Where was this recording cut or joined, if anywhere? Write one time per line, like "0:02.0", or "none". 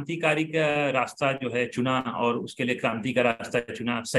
none